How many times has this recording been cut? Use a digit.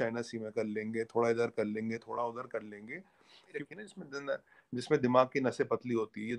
0